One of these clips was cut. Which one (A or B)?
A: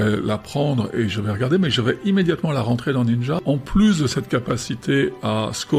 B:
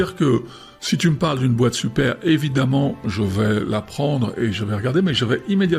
A